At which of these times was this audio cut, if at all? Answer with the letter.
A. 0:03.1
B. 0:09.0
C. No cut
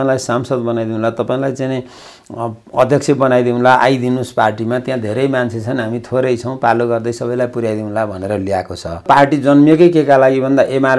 B